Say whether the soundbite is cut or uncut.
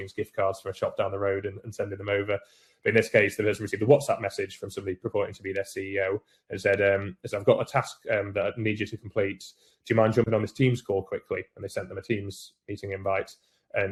uncut